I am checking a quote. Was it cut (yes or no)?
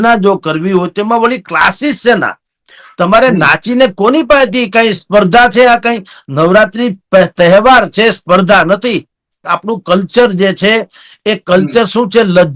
yes